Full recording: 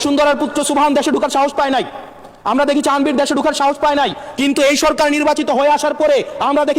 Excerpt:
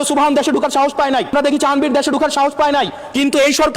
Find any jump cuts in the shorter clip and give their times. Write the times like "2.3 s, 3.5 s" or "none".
1.3 s